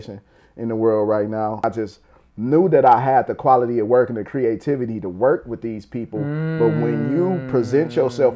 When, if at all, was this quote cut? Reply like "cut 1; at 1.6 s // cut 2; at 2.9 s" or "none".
cut 1; at 1.6 s